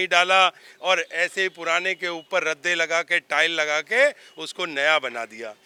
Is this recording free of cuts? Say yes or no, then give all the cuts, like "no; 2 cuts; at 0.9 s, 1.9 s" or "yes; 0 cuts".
yes; 0 cuts